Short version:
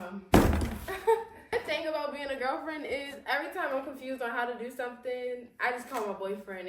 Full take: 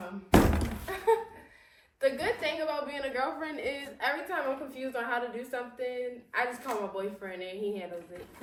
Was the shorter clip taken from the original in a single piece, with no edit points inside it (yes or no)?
no